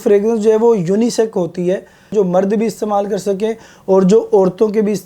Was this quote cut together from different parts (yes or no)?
yes